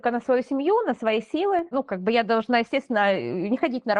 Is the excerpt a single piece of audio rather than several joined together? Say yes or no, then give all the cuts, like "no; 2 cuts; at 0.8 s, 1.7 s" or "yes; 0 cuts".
yes; 0 cuts